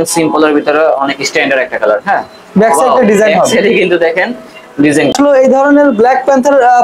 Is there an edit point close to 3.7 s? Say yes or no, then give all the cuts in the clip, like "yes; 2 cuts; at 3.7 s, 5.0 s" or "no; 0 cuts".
no; 1 cut; at 5.1 s